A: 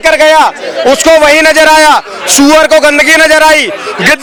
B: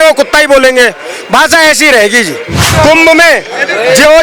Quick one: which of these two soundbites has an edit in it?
B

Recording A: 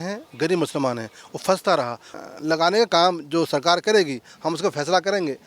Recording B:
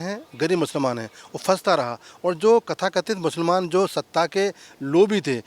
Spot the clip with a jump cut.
A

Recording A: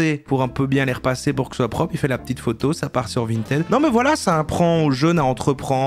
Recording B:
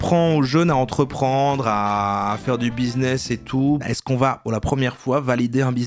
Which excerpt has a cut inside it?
B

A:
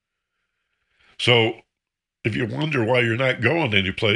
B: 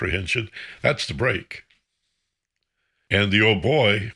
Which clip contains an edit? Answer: B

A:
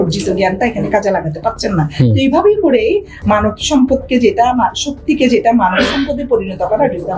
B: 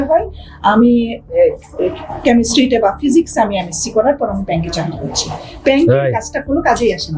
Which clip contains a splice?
A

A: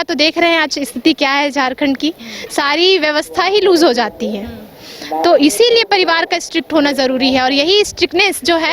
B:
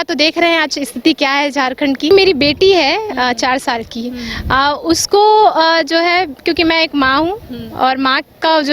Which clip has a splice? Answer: B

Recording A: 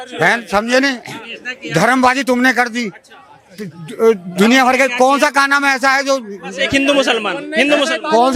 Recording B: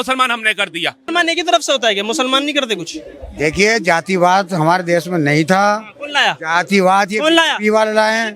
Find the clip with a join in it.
B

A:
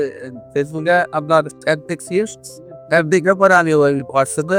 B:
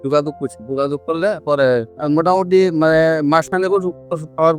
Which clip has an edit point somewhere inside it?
B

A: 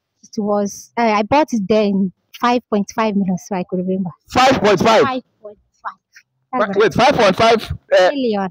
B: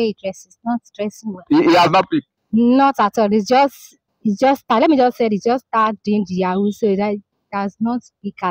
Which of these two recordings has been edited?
A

